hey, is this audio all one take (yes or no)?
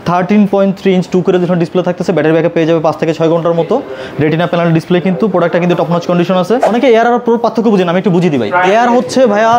no